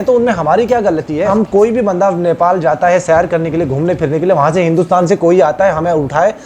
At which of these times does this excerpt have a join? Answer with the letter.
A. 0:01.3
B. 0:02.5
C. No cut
A